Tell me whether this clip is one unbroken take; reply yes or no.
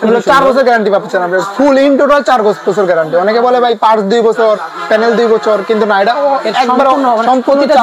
yes